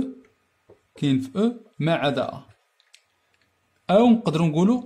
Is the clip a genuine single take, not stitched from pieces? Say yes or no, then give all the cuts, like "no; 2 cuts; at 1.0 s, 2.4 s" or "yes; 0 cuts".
yes; 0 cuts